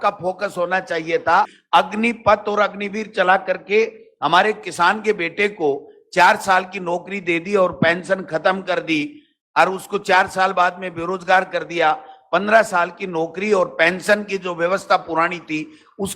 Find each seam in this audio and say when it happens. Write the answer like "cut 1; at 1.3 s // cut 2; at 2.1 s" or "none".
cut 1; at 1.6 s